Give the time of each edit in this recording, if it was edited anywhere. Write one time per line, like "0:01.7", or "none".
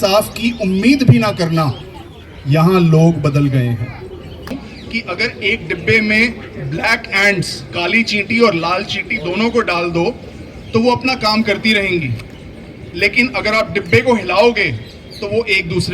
0:04.5